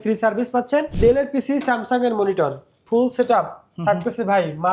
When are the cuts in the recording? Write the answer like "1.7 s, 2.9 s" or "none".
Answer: 0.9 s